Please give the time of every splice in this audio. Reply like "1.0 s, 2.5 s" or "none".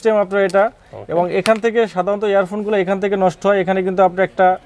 none